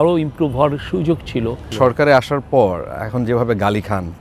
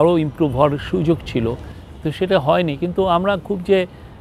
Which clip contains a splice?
first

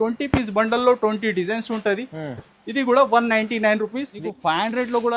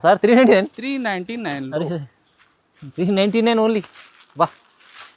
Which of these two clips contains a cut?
first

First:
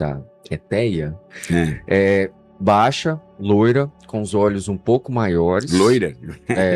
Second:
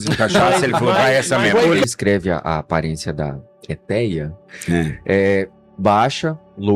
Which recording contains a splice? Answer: second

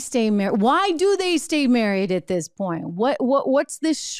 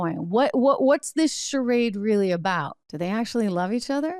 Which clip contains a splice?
second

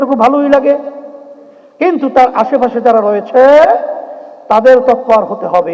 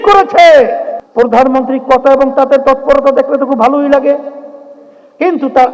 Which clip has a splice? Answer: second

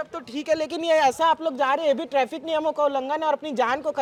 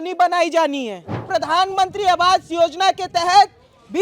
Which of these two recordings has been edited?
second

